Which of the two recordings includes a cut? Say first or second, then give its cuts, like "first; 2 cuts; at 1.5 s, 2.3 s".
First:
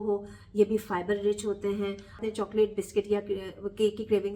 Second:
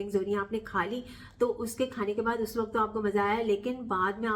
first; 1 cut; at 2.2 s